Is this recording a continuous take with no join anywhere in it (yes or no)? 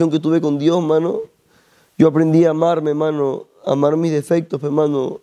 yes